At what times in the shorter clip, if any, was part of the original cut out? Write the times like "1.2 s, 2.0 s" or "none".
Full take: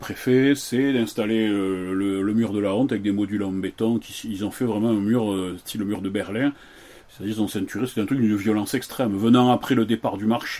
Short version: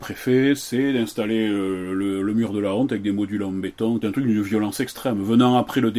4.0 s